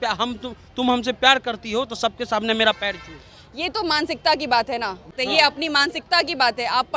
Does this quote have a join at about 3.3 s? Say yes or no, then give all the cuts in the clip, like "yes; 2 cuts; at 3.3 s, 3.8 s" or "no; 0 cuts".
no; 1 cut; at 5.1 s